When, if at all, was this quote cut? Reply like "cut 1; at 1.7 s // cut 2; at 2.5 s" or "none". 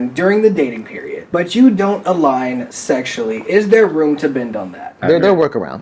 cut 1; at 1.2 s // cut 2; at 4.9 s